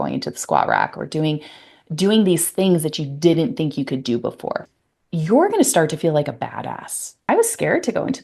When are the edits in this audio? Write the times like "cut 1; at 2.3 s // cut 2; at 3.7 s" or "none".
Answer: cut 1; at 4.6 s // cut 2; at 7.2 s